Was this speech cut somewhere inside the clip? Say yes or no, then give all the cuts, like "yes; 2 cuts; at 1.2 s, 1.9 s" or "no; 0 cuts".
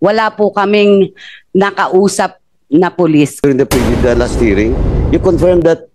yes; 1 cut; at 3.4 s